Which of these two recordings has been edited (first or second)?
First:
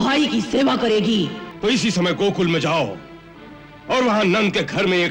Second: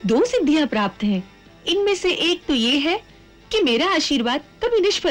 first